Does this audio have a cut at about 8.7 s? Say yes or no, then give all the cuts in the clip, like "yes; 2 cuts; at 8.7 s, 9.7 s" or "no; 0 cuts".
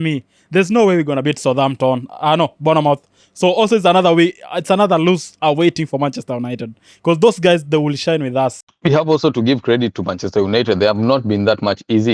yes; 1 cut; at 8.7 s